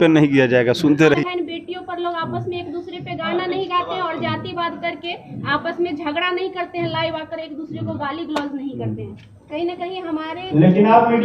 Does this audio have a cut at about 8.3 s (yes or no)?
no